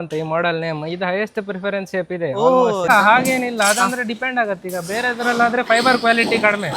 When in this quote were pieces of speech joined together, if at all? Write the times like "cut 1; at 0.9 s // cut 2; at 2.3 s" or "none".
cut 1; at 2.9 s